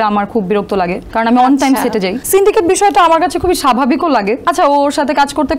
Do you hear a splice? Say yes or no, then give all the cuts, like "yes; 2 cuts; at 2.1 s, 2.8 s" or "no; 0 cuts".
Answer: yes; 3 cuts; at 1.0 s, 2.2 s, 4.4 s